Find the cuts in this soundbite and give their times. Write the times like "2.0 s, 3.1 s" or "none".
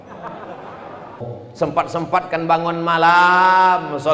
1.3 s